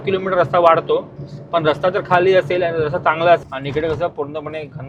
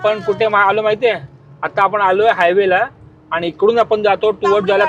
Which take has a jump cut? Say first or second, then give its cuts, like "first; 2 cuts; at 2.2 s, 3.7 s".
first; 1 cut; at 3.4 s